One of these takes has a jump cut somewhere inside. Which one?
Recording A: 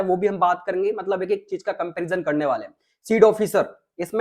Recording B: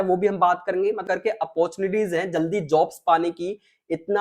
B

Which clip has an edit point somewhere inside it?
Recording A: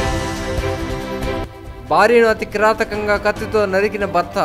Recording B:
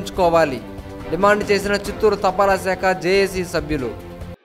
A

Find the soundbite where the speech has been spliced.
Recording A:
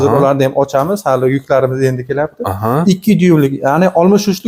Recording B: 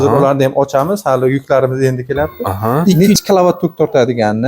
B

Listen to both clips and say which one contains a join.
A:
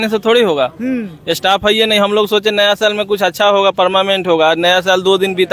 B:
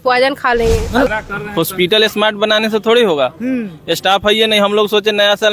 B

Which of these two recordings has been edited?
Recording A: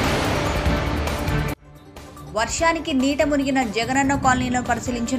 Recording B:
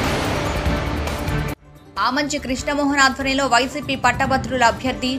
A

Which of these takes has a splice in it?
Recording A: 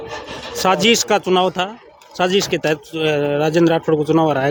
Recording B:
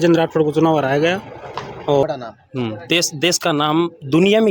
B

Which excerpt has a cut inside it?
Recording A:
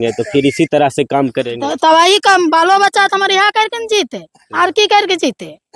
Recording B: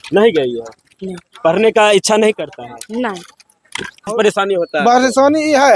B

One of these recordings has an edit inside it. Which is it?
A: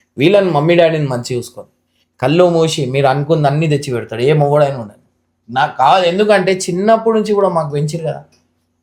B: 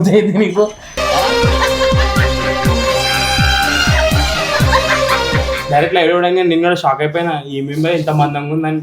B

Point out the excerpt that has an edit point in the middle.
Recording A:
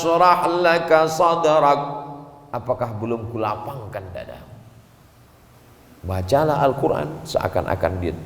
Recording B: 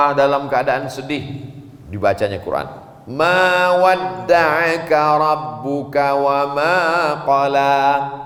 A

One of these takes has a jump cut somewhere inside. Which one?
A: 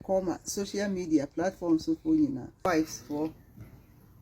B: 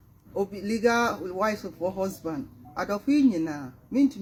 A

